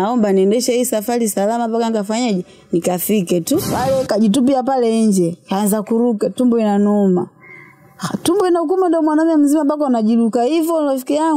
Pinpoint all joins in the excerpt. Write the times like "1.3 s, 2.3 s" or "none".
3.7 s

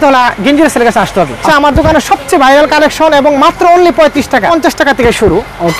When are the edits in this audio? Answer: 1.4 s, 4.5 s

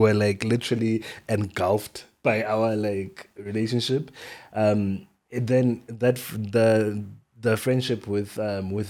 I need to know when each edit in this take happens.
none

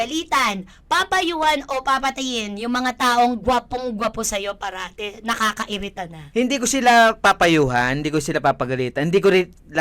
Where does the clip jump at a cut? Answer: 6.2 s

